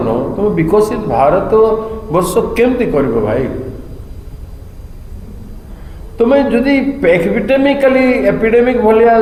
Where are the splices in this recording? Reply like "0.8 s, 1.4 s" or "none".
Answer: none